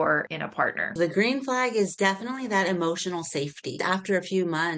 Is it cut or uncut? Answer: cut